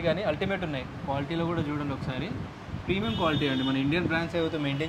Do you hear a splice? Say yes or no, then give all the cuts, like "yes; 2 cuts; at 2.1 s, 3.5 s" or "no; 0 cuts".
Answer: no; 0 cuts